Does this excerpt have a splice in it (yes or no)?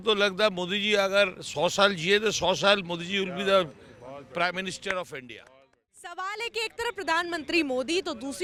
no